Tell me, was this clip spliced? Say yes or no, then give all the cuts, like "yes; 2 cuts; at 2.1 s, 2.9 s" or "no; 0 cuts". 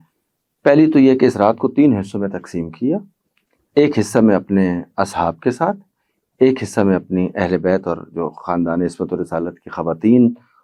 no; 0 cuts